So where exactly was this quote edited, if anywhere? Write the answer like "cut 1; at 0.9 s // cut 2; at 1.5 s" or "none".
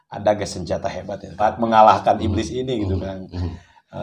cut 1; at 1.4 s